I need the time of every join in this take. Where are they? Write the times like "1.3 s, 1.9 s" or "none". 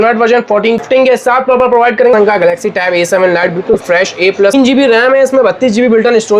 0.8 s, 2.1 s, 4.5 s